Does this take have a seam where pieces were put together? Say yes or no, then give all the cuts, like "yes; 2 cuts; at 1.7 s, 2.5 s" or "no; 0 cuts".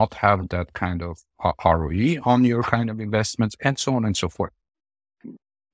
no; 0 cuts